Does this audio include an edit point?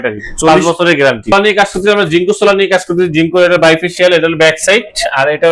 yes; 1 cut; at 1.3 s

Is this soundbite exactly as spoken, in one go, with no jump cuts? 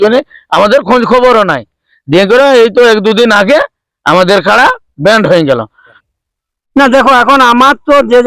no; 1 cut; at 6.0 s

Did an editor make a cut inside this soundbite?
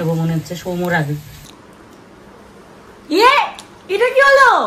yes; 1 cut; at 1.4 s

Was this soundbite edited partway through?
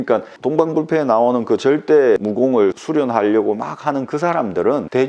yes; 1 cut; at 2.2 s

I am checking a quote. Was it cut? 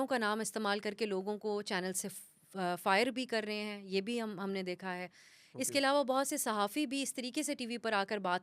no; 0 cuts

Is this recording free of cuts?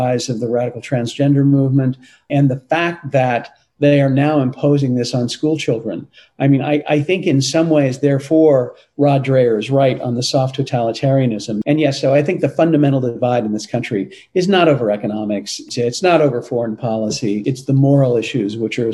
no; 4 cuts; at 2.3 s, 11.6 s, 15.7 s, 17.4 s

